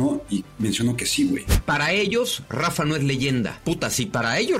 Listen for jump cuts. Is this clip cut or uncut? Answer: cut